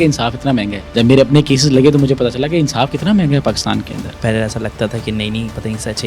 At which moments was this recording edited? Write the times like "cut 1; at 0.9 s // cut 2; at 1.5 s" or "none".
cut 1; at 4.2 s